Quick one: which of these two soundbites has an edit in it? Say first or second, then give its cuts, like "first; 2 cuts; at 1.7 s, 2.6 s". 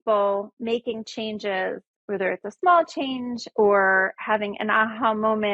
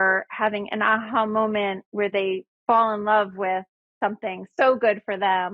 first; 1 cut; at 1.9 s